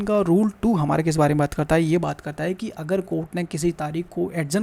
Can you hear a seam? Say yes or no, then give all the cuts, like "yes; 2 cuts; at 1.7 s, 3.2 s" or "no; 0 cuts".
no; 0 cuts